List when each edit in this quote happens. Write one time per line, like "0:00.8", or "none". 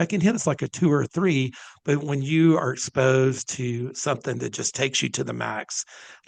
none